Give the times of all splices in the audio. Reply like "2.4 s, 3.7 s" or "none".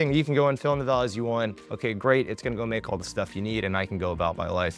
none